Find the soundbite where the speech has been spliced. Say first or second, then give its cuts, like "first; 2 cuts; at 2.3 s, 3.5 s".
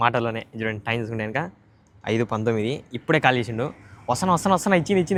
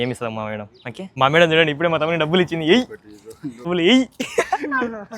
second; 2 cuts; at 1.0 s, 3.7 s